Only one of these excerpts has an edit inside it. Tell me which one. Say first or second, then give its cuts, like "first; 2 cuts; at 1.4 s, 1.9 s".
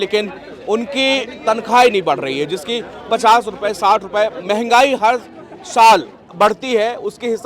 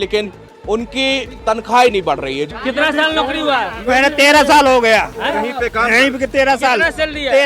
second; 1 cut; at 2.5 s